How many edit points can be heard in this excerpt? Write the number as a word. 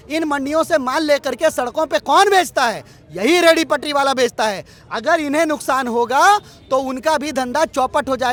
zero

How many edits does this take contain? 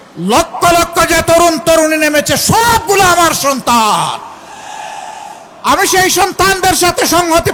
zero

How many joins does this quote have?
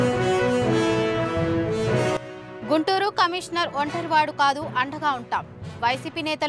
one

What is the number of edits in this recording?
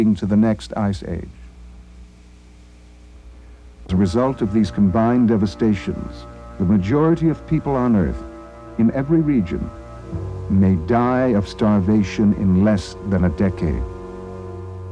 one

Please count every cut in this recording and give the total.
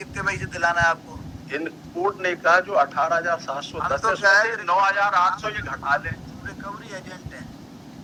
zero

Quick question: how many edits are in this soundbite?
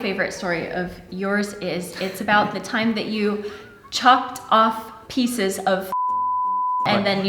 zero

